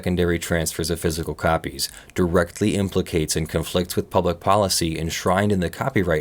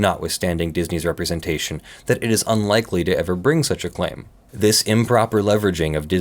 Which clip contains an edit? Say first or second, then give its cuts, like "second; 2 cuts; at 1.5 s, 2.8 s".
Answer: second; 1 cut; at 4.4 s